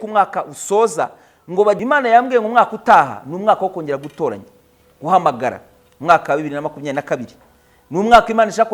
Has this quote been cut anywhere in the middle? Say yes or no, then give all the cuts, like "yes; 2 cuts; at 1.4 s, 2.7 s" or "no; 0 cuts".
yes; 1 cut; at 1.8 s